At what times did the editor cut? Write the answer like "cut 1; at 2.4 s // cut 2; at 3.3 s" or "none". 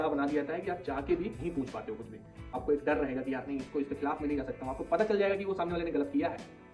cut 1; at 2.6 s

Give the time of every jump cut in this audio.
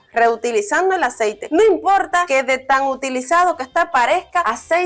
none

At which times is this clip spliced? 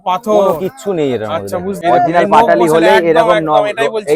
cut 1; at 1.8 s

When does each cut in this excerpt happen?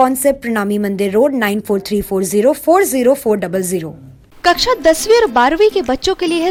none

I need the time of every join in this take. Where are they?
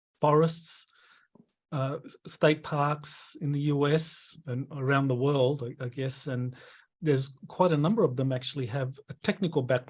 cut 1; at 6.9 s

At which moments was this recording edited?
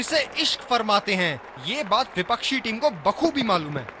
none

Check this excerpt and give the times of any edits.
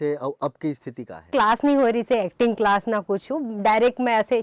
cut 1; at 1.3 s

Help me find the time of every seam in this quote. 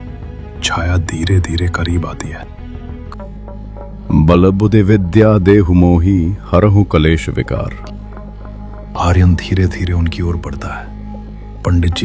cut 1; at 3.1 s

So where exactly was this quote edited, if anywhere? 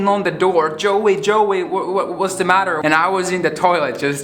cut 1; at 2.8 s

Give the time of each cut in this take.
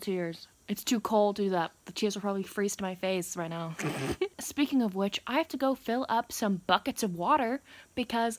none

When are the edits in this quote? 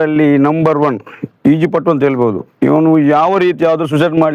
none

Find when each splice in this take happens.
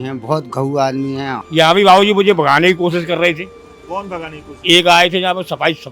cut 1; at 1.4 s

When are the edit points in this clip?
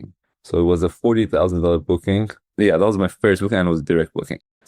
cut 1; at 2.4 s

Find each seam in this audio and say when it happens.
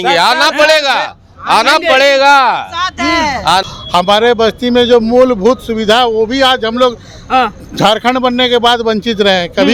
none

